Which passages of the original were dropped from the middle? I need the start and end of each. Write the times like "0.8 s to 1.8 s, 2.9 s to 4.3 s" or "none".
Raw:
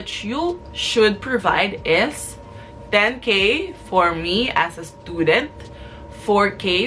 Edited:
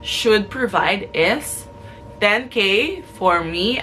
none